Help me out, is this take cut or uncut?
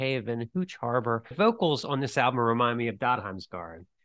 cut